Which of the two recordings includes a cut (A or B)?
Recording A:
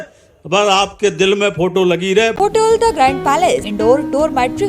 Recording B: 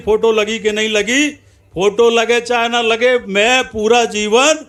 A